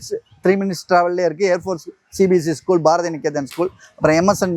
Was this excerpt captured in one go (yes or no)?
yes